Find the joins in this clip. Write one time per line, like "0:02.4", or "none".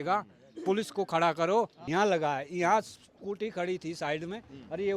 0:01.8